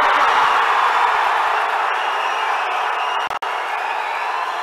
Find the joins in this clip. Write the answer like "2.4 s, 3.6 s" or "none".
none